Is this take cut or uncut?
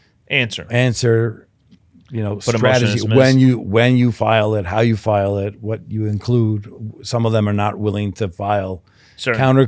uncut